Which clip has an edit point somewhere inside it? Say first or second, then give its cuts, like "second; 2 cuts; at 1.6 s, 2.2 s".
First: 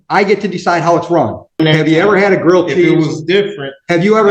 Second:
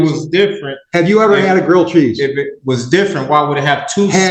first; 1 cut; at 1.1 s